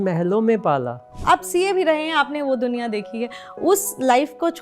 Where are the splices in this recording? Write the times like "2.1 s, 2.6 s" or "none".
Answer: 1.2 s